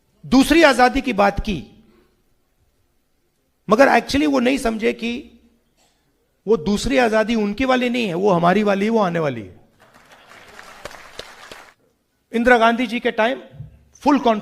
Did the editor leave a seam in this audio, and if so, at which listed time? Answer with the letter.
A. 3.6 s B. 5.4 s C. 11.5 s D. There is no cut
C